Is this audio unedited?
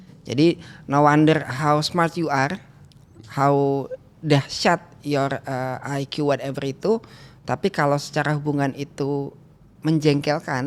yes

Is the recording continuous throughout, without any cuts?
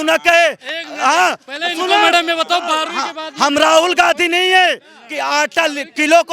yes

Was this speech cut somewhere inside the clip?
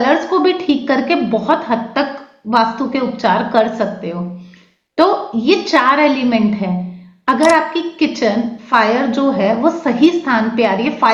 no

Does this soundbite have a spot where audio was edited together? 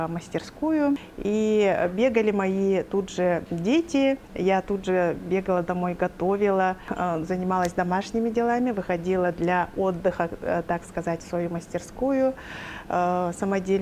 yes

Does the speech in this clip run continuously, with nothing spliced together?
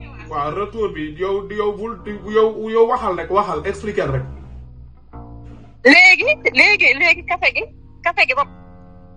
yes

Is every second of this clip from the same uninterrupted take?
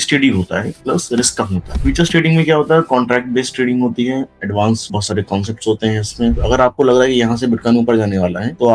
no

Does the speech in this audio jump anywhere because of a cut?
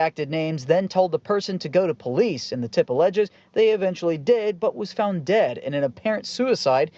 no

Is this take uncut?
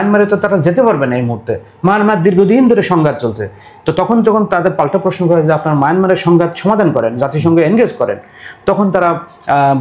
yes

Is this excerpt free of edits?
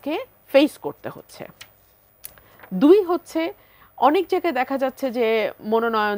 yes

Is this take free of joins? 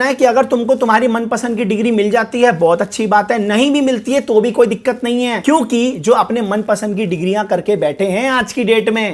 yes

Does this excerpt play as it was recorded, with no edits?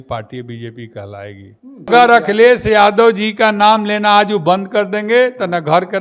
no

